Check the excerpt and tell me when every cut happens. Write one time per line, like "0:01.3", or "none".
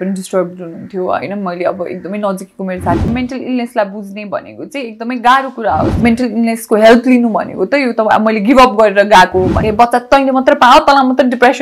0:03.0
0:05.9
0:09.6